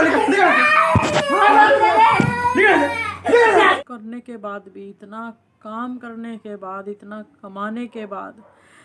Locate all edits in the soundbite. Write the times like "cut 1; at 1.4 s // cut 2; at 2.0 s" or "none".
cut 1; at 3.8 s